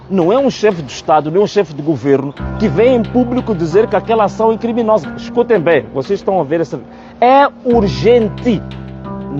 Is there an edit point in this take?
yes; 1 cut; at 5.2 s

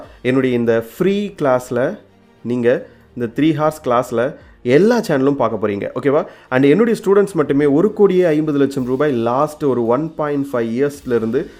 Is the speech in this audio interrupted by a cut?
no; 0 cuts

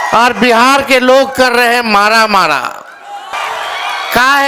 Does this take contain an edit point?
yes; 1 cut; at 3.3 s

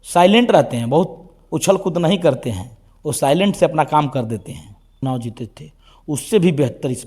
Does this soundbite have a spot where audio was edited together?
yes; 1 cut; at 5.0 s

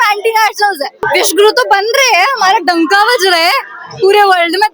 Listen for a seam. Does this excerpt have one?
yes; 1 cut; at 1.0 s

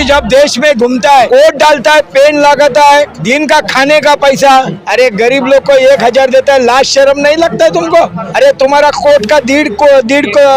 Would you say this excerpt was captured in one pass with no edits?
no; 4 cuts; at 1.3 s, 3.2 s, 4.8 s, 8.2 s

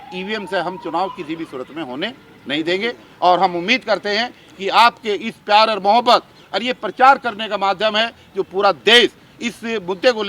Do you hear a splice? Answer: no; 0 cuts

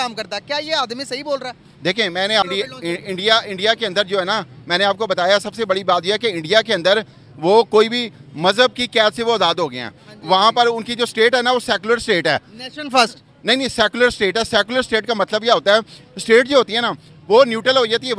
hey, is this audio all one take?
no; 1 cut; at 2.5 s

